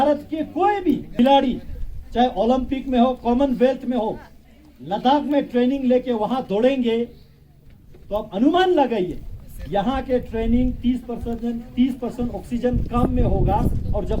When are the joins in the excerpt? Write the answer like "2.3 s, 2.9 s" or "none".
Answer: 1.1 s